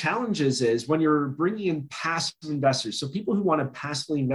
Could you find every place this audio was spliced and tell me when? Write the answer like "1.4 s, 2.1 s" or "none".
none